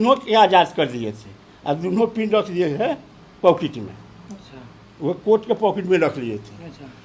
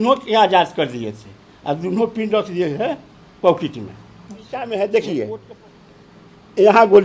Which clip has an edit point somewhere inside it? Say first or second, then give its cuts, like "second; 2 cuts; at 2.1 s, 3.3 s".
second; 1 cut; at 4.5 s